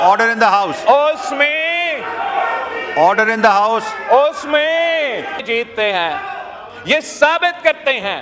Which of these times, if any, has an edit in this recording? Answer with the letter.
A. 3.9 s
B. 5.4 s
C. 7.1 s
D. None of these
B